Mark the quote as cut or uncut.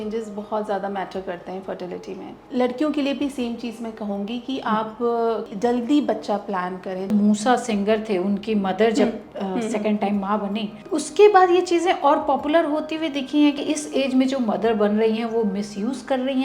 cut